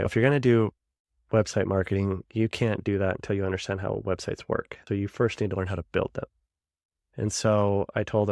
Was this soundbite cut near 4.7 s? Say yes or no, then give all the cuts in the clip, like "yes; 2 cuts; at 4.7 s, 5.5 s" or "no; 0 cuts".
yes; 1 cut; at 4.7 s